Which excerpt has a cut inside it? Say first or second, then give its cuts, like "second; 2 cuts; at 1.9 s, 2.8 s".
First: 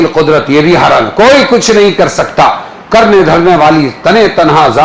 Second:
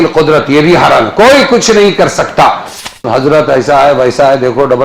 second; 1 cut; at 2.9 s